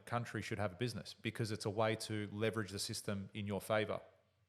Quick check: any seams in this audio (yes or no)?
no